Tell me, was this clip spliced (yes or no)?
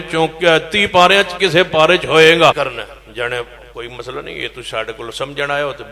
yes